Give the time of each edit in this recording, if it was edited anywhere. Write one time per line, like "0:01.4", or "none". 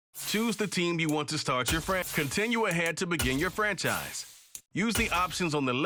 0:02.1